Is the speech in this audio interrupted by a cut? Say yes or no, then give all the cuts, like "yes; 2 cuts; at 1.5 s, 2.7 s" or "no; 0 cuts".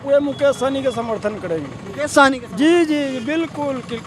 no; 0 cuts